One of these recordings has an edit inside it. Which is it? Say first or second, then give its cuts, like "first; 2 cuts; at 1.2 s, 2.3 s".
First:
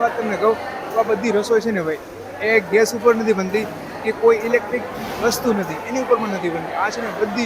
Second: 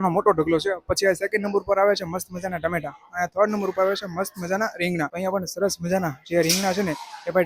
second; 1 cut; at 5.1 s